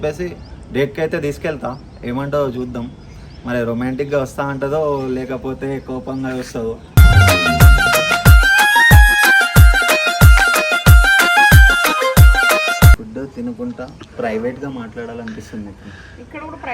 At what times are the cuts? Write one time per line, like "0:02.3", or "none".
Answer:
0:13.0

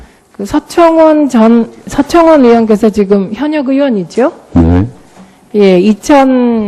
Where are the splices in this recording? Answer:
none

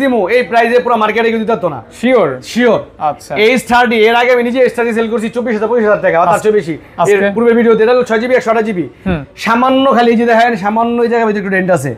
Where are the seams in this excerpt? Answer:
none

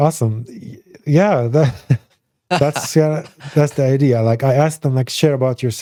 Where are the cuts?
none

